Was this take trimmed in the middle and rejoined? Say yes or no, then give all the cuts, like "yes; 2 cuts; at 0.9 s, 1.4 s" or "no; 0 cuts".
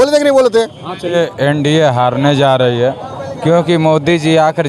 yes; 1 cut; at 1.1 s